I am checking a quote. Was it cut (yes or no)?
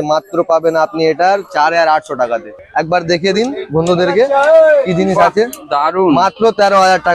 yes